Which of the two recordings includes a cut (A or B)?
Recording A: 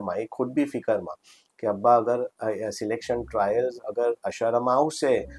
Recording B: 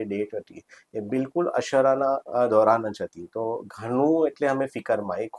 B